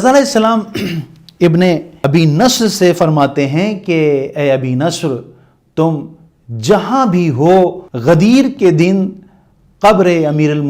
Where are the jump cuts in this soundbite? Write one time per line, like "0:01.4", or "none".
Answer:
0:01.9
0:07.9